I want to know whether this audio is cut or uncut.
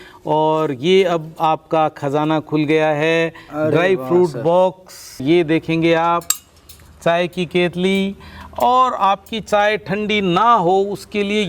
cut